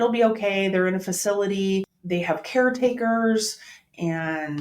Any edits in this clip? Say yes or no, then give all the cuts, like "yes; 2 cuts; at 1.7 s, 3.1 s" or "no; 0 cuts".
yes; 1 cut; at 2.0 s